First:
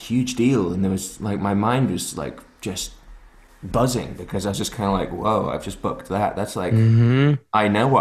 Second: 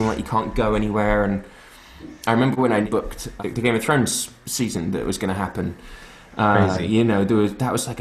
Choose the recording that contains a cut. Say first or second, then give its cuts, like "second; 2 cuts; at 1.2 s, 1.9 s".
second; 1 cut; at 3.1 s